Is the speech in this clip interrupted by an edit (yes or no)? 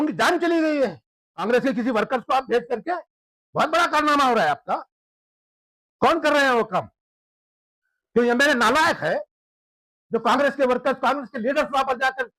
yes